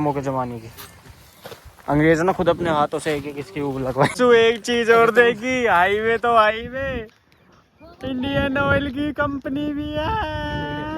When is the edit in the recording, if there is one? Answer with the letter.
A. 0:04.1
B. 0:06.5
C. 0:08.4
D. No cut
A